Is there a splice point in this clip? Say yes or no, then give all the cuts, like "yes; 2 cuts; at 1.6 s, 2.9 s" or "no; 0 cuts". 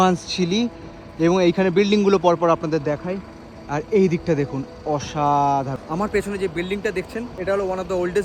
yes; 2 cuts; at 5.8 s, 7.3 s